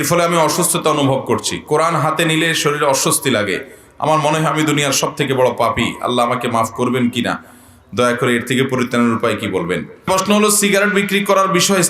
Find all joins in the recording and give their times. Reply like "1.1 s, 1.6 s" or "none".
9.9 s